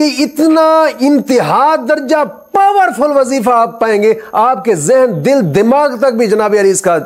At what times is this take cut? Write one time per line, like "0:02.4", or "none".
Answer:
none